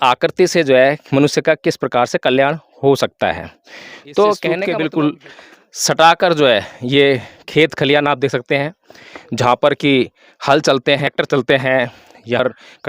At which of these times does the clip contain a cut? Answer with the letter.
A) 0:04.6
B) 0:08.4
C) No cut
A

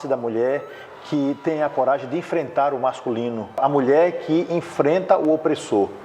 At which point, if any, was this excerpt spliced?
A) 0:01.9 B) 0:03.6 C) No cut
B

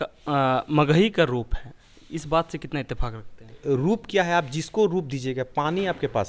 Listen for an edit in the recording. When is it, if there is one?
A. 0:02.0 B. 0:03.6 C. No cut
B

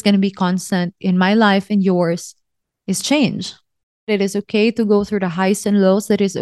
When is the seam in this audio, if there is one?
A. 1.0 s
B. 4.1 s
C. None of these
B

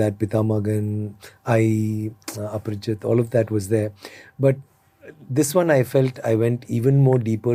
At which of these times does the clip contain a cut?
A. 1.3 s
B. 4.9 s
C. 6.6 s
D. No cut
D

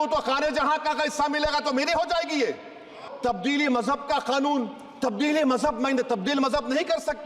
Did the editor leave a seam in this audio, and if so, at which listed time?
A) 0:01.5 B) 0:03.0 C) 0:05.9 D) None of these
B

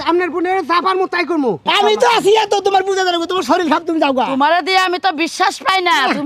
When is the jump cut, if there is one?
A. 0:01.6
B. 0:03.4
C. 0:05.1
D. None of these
A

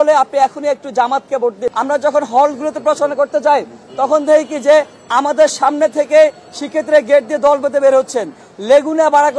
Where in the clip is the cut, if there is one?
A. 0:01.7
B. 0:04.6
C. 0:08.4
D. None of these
A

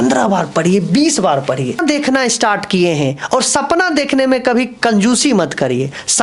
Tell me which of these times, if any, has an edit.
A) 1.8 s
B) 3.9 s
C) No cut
A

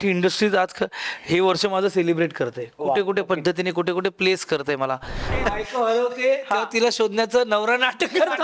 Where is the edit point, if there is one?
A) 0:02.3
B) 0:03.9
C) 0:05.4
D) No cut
C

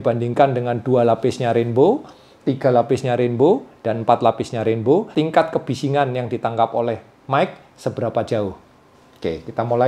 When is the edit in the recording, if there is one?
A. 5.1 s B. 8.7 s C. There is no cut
A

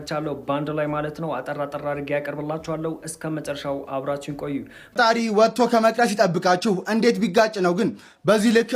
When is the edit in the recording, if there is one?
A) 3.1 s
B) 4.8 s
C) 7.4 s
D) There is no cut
B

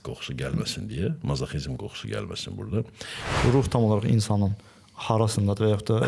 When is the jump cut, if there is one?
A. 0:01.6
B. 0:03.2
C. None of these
B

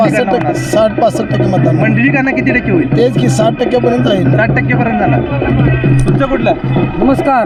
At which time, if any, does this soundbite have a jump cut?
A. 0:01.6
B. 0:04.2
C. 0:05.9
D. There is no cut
D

